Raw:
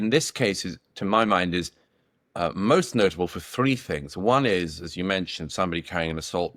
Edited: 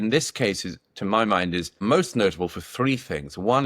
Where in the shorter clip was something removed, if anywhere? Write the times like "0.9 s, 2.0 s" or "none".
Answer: 1.8 s